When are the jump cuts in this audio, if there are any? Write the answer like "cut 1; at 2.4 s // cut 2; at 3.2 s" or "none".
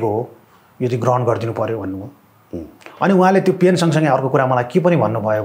none